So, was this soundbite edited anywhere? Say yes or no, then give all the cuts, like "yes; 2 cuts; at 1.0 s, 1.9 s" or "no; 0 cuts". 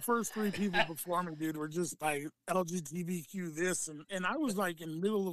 yes; 1 cut; at 1.9 s